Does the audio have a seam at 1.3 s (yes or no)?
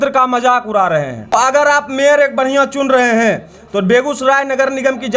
yes